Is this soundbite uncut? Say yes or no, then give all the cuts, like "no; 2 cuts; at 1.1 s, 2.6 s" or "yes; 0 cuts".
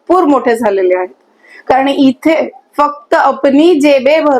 yes; 0 cuts